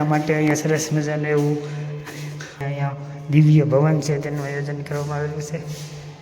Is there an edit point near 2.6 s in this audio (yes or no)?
yes